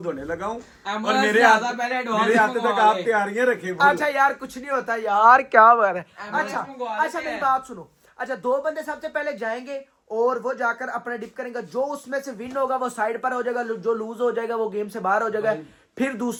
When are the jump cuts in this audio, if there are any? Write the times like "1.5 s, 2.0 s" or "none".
none